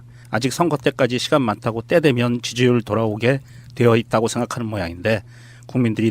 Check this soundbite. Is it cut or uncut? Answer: cut